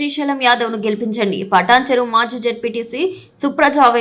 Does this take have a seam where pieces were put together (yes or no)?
no